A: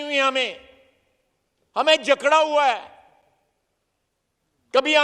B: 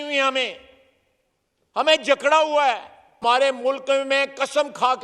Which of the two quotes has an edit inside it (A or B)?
B